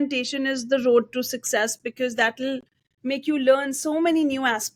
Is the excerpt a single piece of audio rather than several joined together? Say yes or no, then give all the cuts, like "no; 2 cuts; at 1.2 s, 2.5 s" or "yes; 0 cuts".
yes; 0 cuts